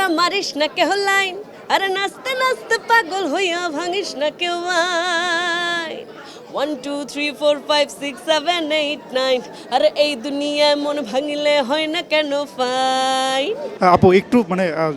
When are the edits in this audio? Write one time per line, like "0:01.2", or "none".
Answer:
none